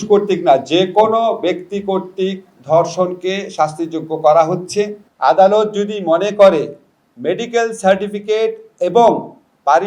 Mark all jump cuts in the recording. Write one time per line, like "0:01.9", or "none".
0:05.0